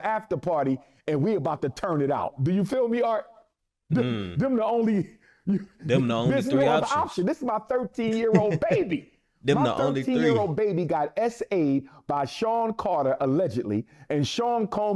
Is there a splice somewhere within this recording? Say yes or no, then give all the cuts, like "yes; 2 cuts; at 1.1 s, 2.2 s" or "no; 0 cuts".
no; 0 cuts